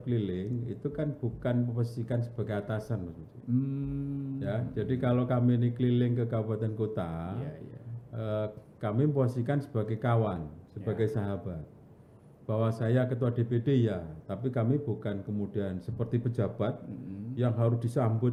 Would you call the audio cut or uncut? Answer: uncut